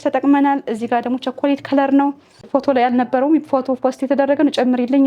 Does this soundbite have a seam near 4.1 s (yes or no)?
no